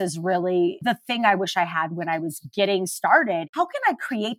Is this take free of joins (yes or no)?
no